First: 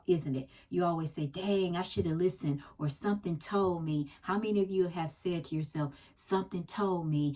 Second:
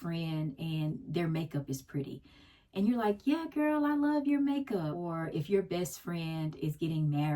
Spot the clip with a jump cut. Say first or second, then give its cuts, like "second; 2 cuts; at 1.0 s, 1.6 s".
second; 1 cut; at 5.1 s